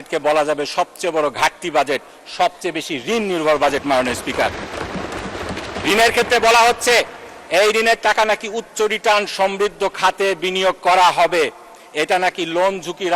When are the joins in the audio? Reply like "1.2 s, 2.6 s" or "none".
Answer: none

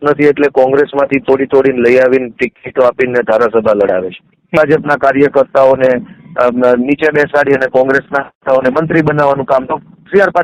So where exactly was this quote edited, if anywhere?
4.5 s

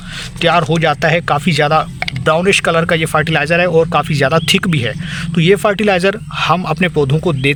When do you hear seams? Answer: none

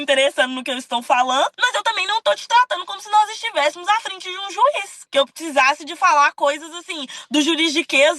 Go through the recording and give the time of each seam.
1.6 s

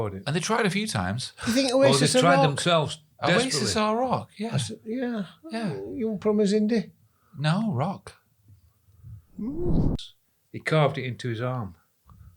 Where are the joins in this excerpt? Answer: 9.9 s

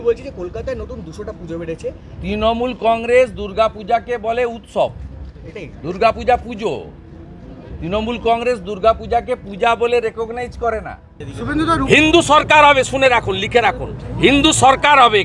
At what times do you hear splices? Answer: 11.3 s

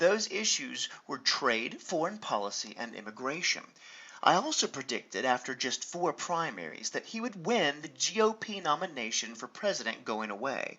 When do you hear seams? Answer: 9.8 s

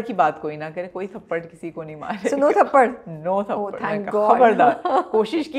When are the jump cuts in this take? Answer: none

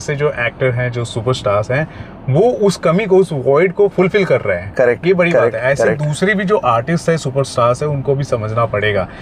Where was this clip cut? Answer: 3.9 s

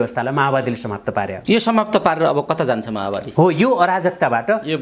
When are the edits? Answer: 1.3 s

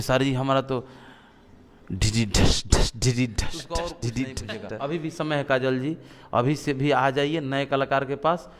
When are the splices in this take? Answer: 5.1 s

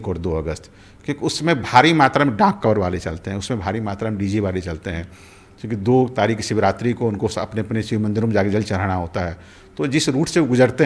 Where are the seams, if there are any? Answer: none

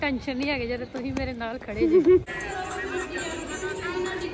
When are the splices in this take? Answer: 2.2 s

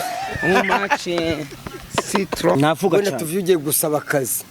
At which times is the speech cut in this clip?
2.6 s

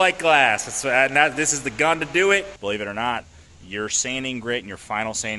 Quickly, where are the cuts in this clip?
2.5 s

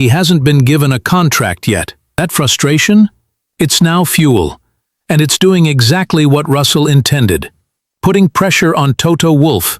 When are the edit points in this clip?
2.0 s

